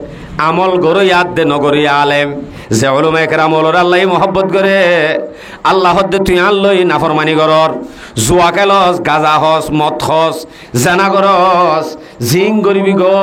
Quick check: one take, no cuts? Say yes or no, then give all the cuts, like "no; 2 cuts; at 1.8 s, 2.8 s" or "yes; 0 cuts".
no; 1 cut; at 2.5 s